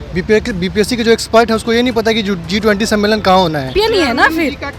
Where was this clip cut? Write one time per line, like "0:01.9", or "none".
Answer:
0:03.7